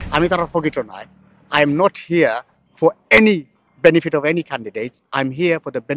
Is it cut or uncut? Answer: uncut